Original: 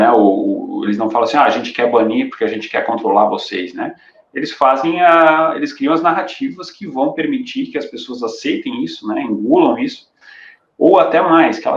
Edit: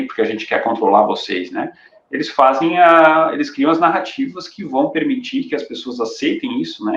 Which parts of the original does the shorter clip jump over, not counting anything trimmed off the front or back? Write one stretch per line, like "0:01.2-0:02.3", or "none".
none